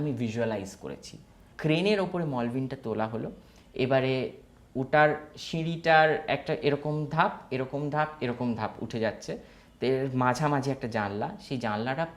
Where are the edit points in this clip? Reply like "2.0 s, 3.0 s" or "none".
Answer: 1.5 s